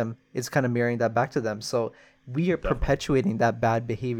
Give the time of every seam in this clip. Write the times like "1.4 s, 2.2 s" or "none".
none